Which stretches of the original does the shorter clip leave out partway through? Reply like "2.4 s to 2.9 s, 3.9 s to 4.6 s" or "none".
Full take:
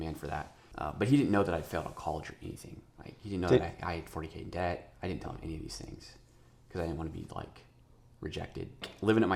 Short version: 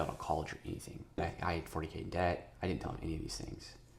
3.0 s to 3.6 s